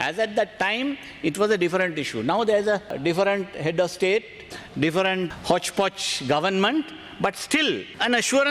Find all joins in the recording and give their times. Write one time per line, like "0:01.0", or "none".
0:03.0